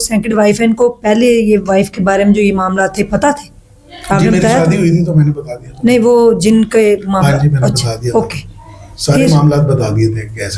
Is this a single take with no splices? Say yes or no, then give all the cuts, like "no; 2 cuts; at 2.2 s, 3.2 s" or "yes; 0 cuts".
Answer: yes; 0 cuts